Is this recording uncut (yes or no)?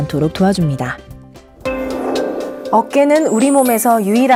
yes